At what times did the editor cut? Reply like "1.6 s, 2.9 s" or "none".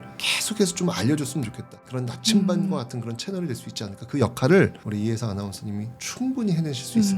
1.8 s